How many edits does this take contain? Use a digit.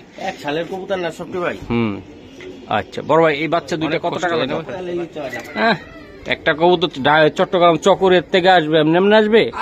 1